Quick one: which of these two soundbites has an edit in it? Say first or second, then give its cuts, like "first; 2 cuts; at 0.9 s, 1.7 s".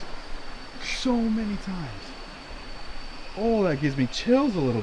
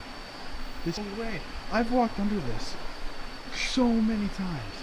second; 1 cut; at 1.0 s